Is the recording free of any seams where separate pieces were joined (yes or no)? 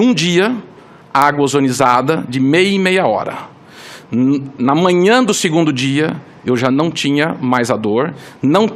yes